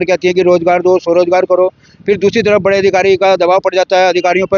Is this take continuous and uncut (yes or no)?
yes